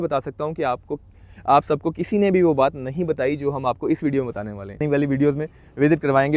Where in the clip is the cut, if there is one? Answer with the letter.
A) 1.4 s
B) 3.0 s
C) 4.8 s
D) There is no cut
C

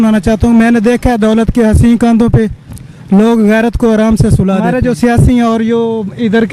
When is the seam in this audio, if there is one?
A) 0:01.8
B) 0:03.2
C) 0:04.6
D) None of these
C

